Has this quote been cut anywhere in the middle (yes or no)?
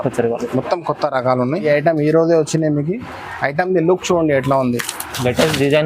yes